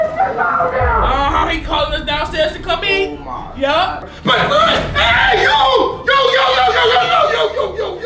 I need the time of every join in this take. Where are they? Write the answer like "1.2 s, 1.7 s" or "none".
1.0 s, 4.0 s

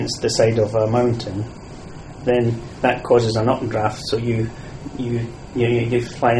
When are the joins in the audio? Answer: 5.4 s

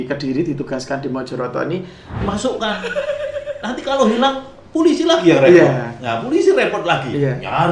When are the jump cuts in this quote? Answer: 2.2 s

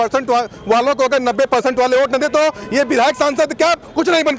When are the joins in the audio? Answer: none

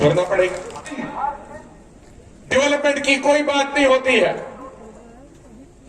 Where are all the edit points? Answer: 0.9 s

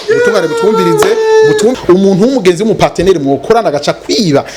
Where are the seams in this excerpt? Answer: 1.8 s

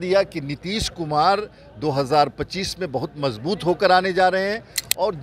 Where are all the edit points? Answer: none

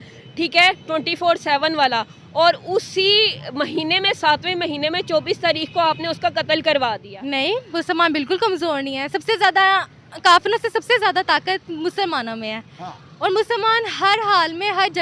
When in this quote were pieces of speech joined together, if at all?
7.1 s

